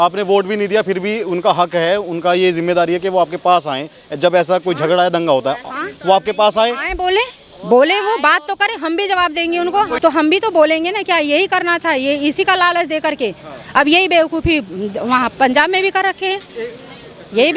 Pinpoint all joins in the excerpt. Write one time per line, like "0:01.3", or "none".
0:09.9